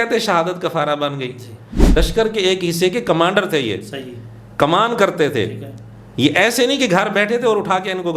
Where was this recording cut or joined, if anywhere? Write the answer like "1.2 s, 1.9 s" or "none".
1.8 s